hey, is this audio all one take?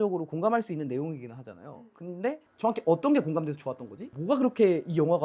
no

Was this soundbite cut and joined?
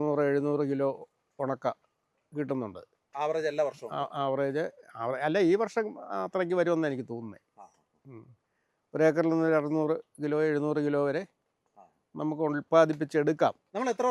no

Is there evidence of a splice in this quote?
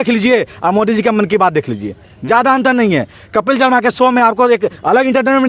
no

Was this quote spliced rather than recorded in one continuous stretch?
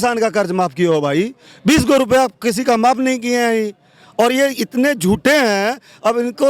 no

